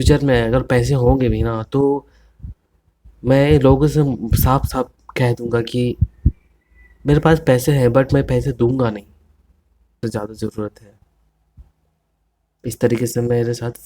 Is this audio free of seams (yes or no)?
no